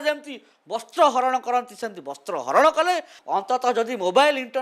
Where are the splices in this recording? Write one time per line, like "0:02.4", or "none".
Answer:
0:03.1